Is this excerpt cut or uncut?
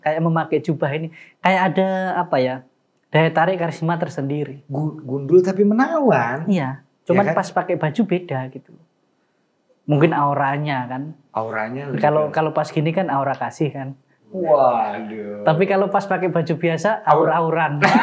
uncut